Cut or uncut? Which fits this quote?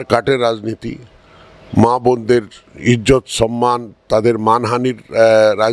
uncut